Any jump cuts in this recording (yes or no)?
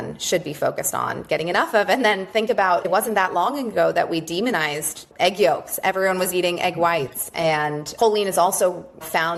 no